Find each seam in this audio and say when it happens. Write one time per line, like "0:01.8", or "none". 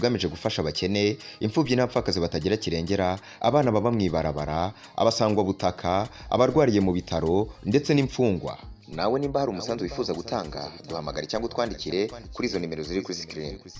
none